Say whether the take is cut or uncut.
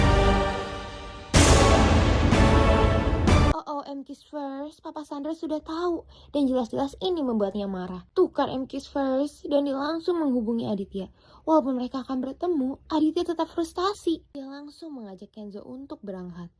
uncut